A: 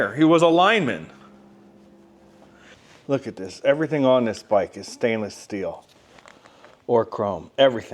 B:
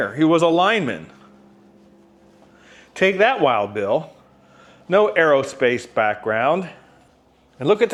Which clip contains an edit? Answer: A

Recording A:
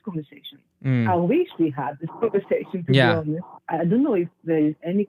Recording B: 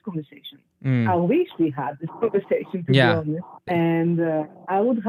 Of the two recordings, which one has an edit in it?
A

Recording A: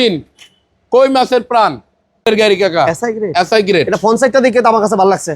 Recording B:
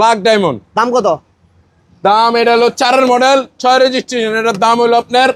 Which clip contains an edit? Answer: A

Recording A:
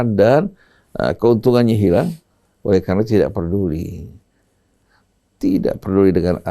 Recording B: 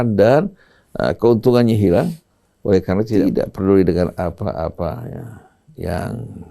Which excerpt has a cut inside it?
B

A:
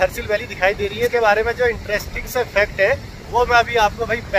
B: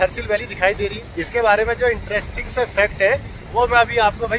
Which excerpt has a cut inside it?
A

